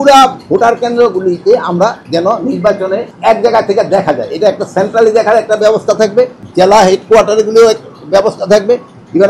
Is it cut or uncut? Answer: cut